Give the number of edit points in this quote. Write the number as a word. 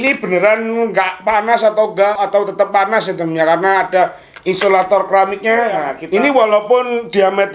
two